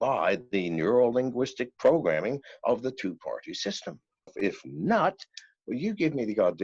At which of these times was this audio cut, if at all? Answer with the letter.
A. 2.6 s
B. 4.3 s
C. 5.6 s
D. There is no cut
B